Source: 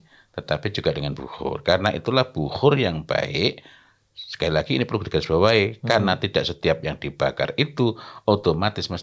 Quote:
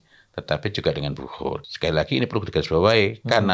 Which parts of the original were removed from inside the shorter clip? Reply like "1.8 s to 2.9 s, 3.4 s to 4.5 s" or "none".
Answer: 1.6 s to 4.2 s